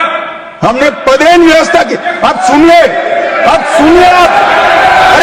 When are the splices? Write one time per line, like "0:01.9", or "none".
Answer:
none